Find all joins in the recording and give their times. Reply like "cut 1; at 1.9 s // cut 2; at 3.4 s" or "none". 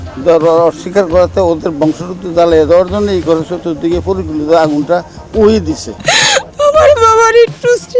cut 1; at 5.9 s